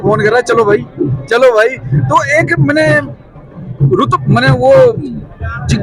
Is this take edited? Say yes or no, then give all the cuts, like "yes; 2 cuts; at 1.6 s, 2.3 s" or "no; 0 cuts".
no; 0 cuts